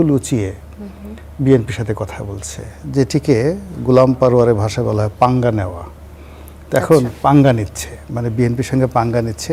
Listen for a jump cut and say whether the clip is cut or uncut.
uncut